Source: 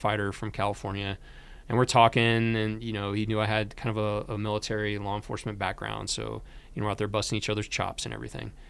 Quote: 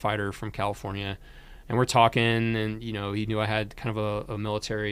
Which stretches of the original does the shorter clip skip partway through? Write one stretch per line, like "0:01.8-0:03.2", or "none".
none